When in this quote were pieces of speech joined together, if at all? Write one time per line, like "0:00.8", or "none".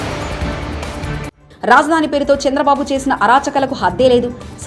0:01.3